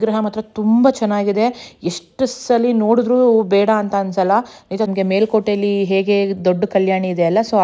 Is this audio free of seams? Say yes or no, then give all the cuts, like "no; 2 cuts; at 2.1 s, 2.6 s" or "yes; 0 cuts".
no; 1 cut; at 4.9 s